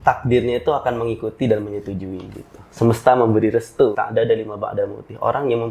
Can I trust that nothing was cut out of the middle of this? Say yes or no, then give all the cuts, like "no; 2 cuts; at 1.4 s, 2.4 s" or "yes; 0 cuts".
no; 1 cut; at 3.9 s